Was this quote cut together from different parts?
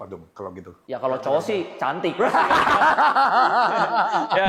no; 0 cuts

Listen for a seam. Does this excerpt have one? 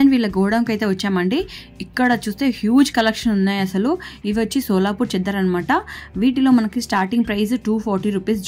no; 0 cuts

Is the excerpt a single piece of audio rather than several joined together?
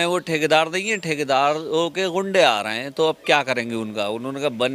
yes; 0 cuts

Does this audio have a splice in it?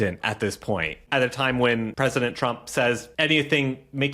yes; 2 cuts; at 1.0 s, 1.9 s

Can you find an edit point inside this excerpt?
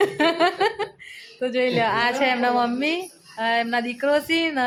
no; 0 cuts

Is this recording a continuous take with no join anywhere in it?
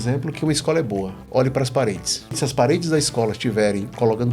no; 2 cuts; at 1.3 s, 2.4 s

